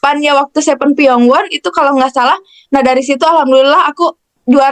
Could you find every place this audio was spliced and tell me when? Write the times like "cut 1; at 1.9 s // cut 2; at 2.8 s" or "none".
none